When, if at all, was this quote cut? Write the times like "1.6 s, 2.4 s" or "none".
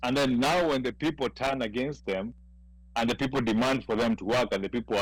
none